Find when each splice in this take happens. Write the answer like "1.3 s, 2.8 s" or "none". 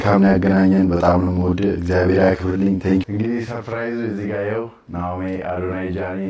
none